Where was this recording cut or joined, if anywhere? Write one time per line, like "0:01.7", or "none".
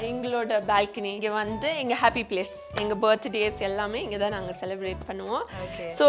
none